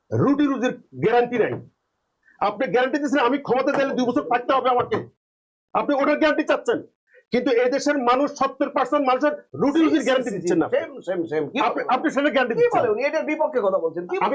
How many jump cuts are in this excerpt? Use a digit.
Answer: 0